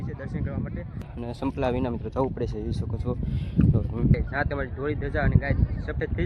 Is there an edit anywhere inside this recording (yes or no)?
yes